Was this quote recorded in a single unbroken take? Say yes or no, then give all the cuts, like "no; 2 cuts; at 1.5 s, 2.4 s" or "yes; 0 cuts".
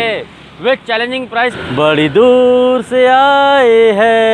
no; 1 cut; at 1.5 s